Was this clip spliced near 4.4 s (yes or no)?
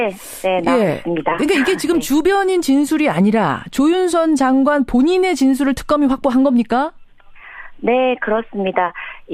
no